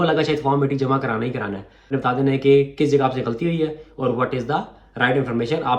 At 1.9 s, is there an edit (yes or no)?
yes